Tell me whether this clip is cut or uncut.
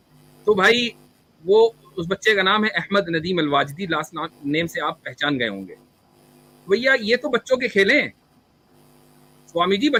uncut